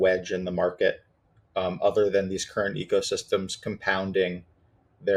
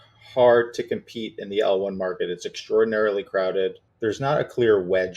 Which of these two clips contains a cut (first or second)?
second